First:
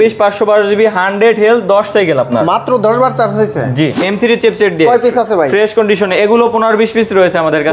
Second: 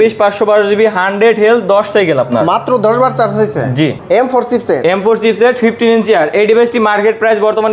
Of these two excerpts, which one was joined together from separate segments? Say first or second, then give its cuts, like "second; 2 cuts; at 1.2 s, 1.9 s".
first; 1 cut; at 4.0 s